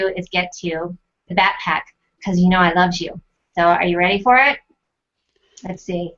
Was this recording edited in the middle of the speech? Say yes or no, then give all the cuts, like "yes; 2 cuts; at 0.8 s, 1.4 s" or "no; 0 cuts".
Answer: yes; 1 cut; at 2.9 s